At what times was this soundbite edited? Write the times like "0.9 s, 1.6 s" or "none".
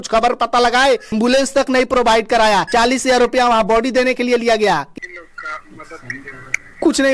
1.1 s, 2.7 s, 4.9 s